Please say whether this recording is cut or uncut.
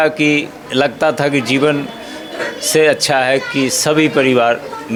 uncut